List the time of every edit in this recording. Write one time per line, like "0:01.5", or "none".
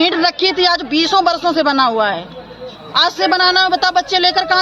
none